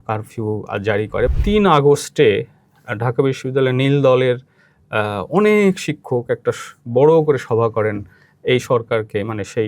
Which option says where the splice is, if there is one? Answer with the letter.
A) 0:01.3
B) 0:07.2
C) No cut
A